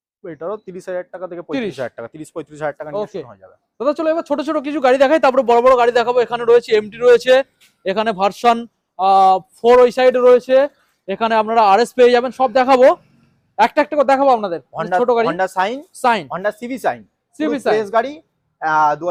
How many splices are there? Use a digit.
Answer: 0